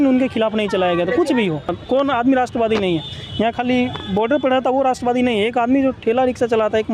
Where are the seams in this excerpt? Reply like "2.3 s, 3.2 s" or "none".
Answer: 1.8 s